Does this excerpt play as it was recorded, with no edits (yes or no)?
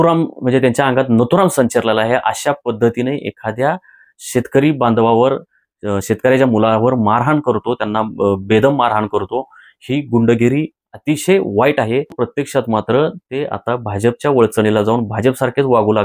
no